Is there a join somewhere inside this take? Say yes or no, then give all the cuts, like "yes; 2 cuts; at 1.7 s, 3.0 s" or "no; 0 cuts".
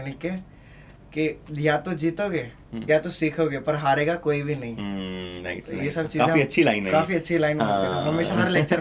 no; 0 cuts